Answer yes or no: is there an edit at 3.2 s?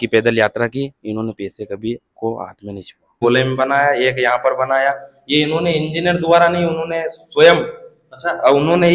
yes